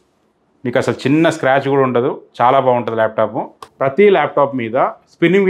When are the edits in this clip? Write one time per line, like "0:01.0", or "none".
0:03.7

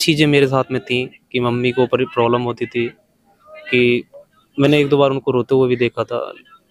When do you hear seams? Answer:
none

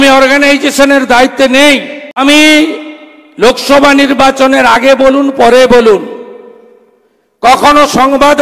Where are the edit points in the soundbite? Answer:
0:02.2

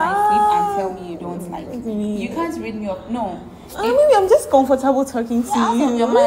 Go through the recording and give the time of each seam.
none

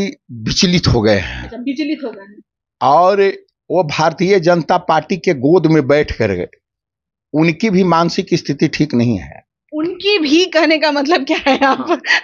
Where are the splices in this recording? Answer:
none

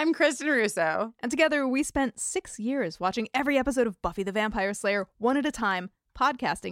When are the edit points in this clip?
none

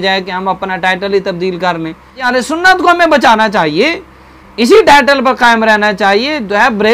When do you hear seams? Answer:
0:02.2

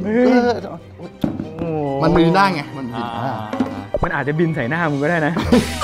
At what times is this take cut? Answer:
0:03.8

